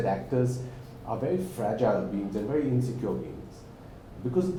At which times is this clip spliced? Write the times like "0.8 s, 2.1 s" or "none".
none